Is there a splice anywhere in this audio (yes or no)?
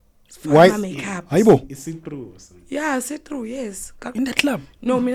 no